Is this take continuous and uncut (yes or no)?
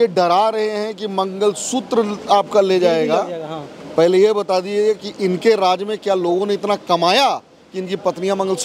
yes